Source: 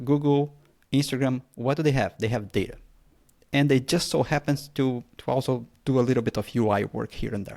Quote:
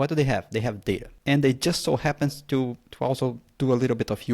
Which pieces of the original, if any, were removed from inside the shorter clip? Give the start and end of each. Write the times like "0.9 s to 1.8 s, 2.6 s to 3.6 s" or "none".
2.8 s to 3.4 s